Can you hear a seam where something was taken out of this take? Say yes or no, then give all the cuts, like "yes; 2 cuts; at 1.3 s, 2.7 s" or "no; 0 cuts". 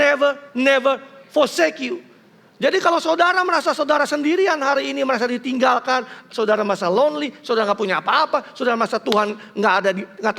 no; 0 cuts